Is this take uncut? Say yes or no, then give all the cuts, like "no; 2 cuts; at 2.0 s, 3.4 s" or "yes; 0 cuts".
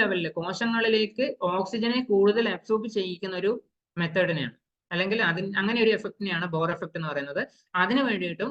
yes; 0 cuts